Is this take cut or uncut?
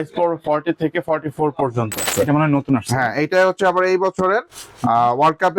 cut